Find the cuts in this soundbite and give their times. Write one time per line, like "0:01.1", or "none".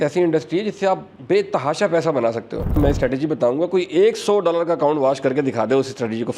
0:01.1
0:02.7